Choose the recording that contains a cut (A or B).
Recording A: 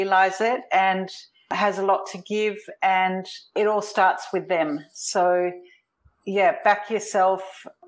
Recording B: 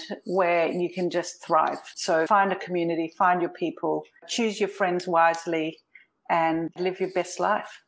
B